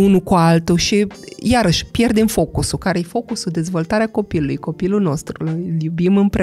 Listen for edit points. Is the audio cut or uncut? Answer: uncut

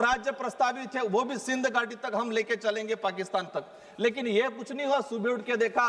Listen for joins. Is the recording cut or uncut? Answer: uncut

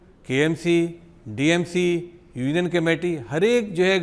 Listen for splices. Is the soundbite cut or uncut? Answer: uncut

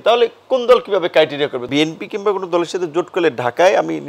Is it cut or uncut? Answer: cut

